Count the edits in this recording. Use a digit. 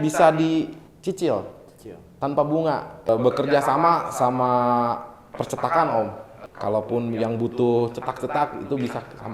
2